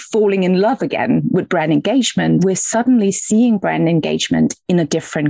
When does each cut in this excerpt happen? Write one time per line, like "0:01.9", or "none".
0:02.4